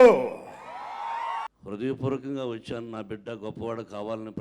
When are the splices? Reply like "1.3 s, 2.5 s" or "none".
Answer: 1.5 s

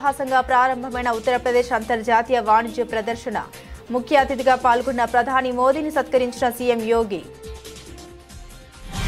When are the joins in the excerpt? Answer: 7.2 s

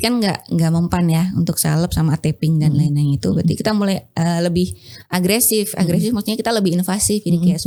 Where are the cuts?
none

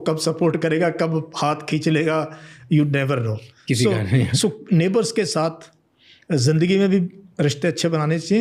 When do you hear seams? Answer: none

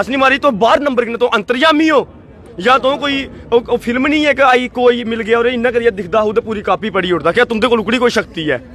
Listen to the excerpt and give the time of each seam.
none

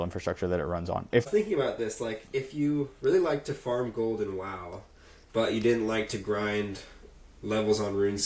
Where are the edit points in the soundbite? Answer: 1.3 s

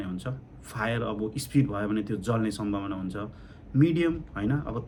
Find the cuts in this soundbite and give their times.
none

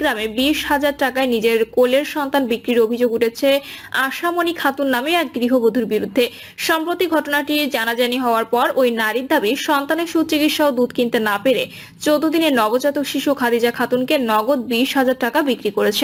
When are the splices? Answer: none

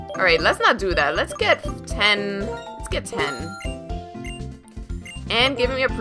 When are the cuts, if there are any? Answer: 3.4 s

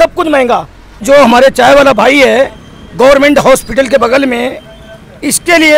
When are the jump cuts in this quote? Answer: 1.0 s

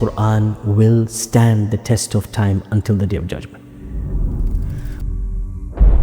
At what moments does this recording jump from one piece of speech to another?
5.1 s

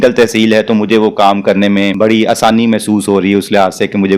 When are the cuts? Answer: 1.9 s

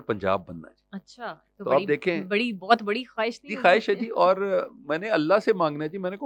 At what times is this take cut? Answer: none

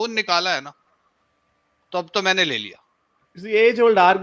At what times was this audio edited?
none

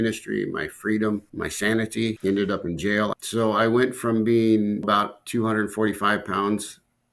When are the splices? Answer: 1.3 s, 2.2 s, 3.1 s, 4.8 s

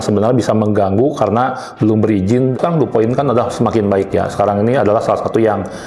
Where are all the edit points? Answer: 2.6 s

